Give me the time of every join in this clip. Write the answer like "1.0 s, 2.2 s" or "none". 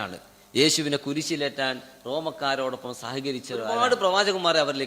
3.7 s